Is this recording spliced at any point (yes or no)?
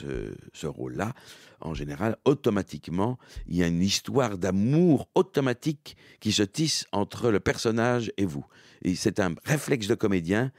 no